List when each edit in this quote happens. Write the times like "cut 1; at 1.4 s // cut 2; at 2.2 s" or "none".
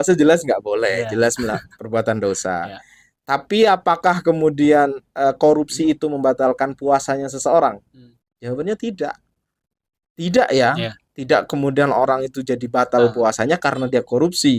none